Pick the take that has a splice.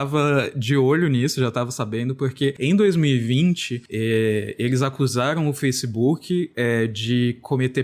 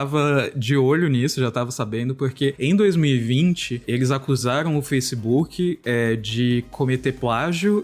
second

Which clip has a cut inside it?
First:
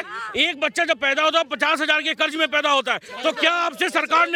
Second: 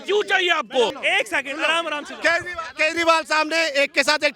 second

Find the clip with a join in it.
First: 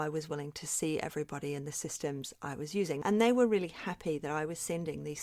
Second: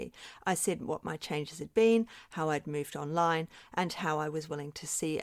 first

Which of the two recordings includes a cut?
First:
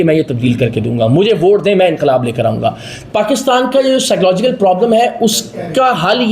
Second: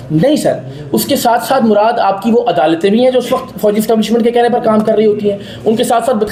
first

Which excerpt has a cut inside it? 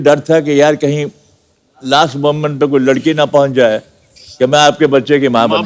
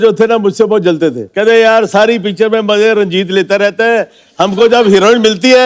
second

